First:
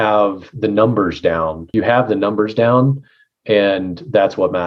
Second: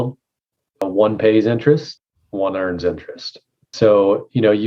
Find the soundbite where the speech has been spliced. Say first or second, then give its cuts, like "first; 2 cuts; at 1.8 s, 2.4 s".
first; 1 cut; at 1.6 s